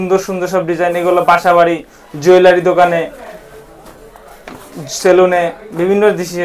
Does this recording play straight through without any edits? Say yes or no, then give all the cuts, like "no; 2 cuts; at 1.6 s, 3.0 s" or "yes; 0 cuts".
yes; 0 cuts